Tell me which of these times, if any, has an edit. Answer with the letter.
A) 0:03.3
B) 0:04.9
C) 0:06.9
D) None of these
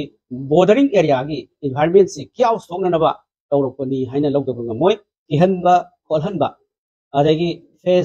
B